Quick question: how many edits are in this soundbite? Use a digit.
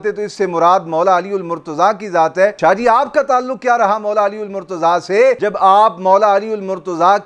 2